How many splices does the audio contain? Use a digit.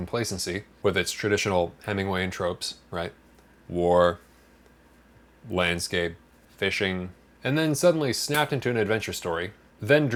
0